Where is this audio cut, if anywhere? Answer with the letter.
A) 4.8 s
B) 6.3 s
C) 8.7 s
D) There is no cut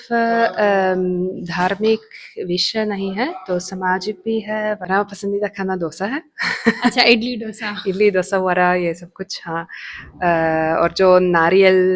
A